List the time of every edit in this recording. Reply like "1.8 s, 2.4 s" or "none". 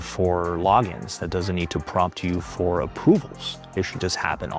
none